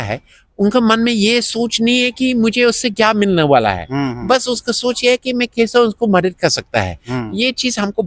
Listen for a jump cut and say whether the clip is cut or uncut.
uncut